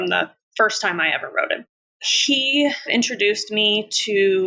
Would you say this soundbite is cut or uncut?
cut